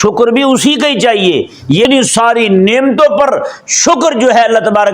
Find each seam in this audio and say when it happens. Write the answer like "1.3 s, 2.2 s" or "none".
1.9 s